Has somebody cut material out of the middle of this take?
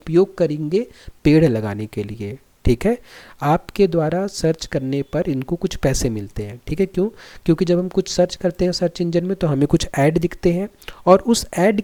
no; 0 cuts

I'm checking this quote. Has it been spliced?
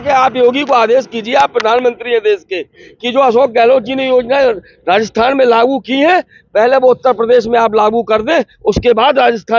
no; 0 cuts

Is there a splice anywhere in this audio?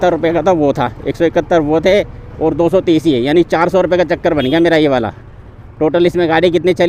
no; 0 cuts

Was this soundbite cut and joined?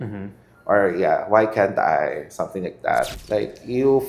yes; 1 cut; at 3.2 s

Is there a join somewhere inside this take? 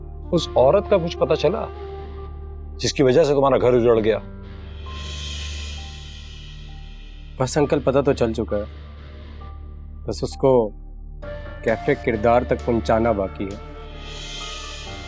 no; 0 cuts

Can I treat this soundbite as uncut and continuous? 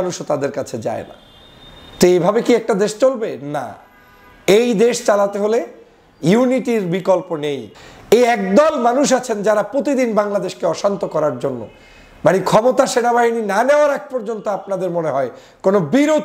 no; 1 cut; at 7.7 s

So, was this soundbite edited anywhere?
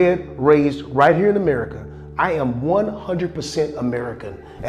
no; 0 cuts

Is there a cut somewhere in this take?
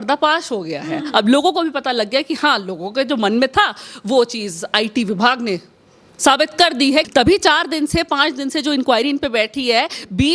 yes; 1 cut; at 7.1 s

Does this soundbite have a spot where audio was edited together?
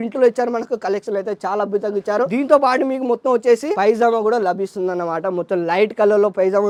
no; 0 cuts

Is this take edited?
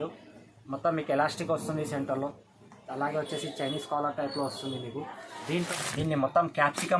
yes; 1 cut; at 5.7 s

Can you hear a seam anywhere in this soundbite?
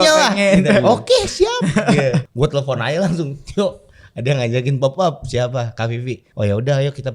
yes; 2 cuts; at 2.3 s, 6.2 s

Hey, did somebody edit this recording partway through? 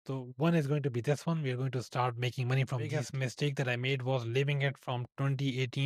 yes; 1 cut; at 2.9 s

